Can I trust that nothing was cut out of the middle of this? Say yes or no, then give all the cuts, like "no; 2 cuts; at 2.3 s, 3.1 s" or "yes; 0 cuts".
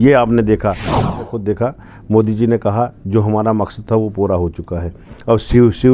no; 1 cut; at 0.9 s